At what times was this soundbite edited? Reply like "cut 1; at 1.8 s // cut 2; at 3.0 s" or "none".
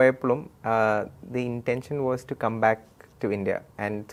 none